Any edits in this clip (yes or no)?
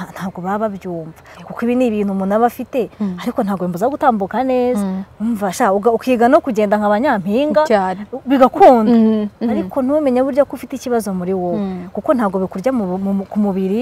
no